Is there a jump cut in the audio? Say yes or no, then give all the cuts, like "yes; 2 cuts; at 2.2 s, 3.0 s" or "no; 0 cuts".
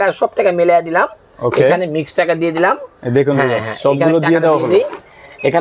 no; 0 cuts